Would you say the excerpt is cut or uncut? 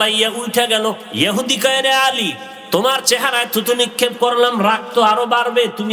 cut